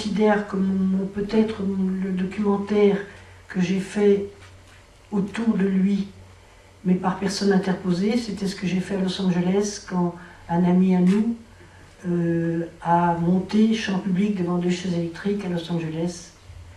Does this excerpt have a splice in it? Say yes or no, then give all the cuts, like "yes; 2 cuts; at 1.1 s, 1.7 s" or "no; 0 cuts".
yes; 1 cut; at 13.7 s